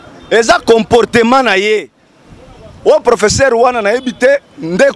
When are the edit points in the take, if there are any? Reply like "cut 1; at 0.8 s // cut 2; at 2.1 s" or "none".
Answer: none